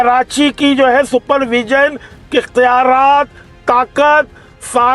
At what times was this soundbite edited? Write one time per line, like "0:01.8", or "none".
none